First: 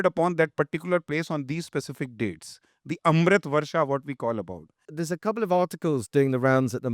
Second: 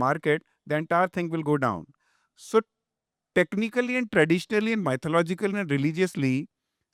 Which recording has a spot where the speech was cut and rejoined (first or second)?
first